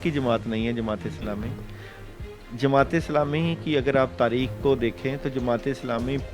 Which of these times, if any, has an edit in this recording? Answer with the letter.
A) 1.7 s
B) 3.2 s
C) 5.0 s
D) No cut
D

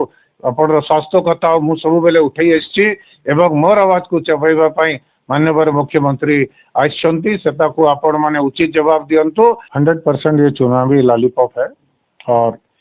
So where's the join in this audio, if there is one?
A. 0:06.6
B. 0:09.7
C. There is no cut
B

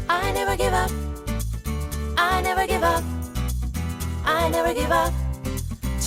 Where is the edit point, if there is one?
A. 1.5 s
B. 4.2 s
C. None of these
C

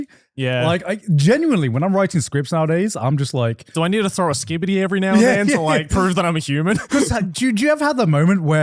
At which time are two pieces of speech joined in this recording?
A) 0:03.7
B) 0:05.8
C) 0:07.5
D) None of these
A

